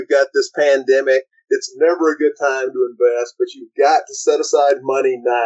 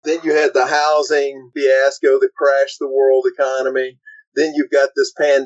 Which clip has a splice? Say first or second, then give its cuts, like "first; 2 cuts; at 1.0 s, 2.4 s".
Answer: second; 1 cut; at 1.4 s